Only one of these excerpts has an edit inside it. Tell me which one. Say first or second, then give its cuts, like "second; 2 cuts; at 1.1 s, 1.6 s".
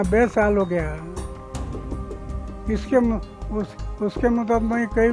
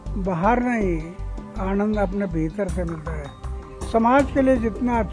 first; 2 cuts; at 1.1 s, 2.6 s